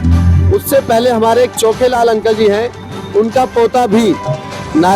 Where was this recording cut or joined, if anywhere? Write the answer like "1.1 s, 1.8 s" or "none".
none